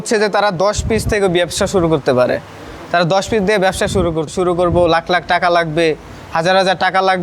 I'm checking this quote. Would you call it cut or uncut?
cut